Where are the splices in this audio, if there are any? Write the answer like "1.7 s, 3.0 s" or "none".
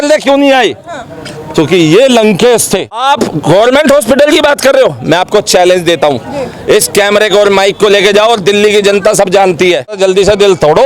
3.0 s, 10.0 s